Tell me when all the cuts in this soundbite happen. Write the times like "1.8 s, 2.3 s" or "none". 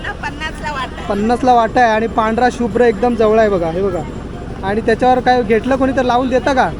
none